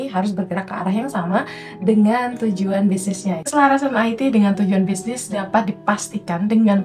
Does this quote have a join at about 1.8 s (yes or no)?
no